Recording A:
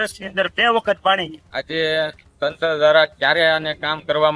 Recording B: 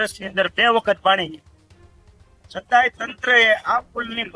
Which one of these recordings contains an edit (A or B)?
A